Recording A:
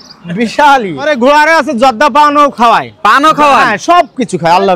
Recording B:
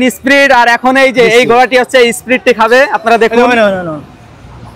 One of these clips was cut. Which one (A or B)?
A